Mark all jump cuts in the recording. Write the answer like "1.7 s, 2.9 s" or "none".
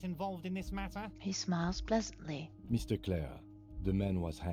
none